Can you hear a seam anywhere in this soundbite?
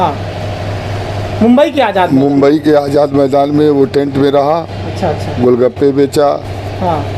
no; 0 cuts

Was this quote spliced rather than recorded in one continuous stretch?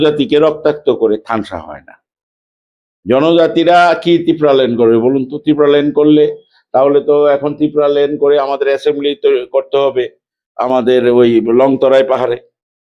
no; 0 cuts

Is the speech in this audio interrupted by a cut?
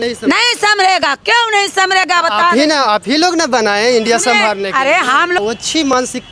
yes; 1 cut; at 5.4 s

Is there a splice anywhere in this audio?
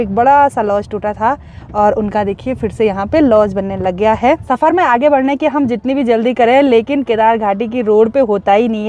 no; 0 cuts

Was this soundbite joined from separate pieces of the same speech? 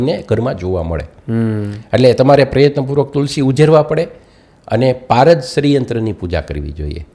no; 0 cuts

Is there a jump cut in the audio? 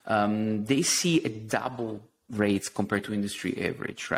yes; 1 cut; at 2.2 s

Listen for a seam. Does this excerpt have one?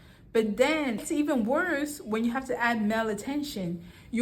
yes; 1 cut; at 1.0 s

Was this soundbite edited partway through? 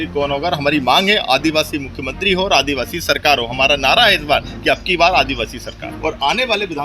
yes; 1 cut; at 5.9 s

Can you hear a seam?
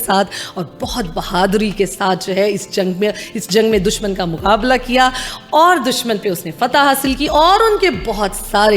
no; 0 cuts

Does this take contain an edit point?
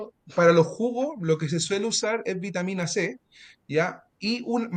no; 0 cuts

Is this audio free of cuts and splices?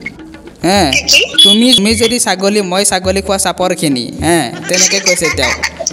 no; 1 cut; at 1.8 s

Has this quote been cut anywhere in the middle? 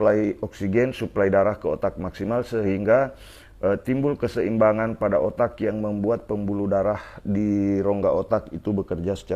no; 0 cuts

